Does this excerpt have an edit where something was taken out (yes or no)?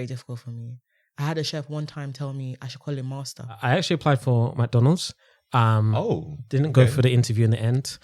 yes